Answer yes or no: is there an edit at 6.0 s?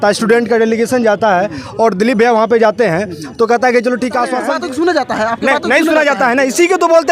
no